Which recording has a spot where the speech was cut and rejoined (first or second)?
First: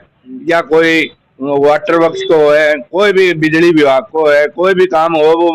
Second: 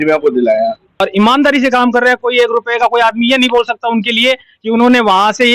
second